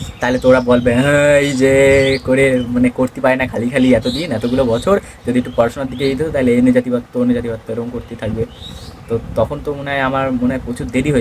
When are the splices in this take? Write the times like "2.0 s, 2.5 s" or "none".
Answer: none